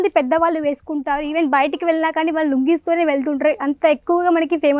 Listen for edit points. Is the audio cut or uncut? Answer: uncut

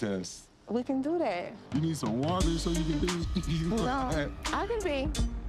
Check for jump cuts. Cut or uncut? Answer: uncut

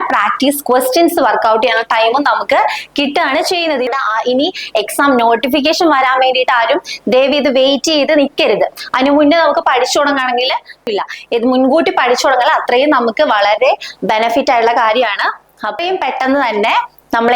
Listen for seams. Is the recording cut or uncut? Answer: cut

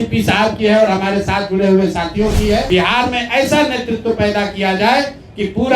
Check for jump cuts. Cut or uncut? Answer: cut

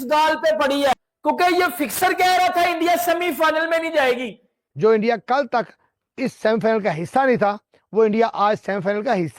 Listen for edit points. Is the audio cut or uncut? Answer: cut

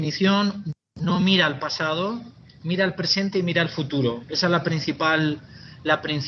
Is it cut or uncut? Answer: uncut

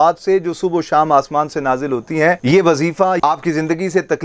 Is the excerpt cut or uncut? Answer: cut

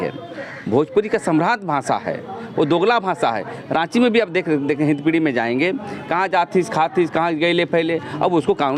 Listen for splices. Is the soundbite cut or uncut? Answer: uncut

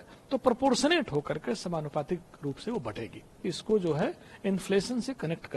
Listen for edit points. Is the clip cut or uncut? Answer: cut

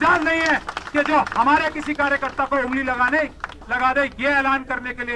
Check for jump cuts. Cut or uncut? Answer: uncut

